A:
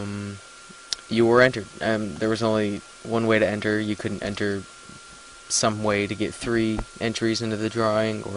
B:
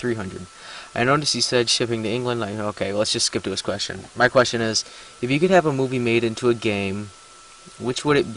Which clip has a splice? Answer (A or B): B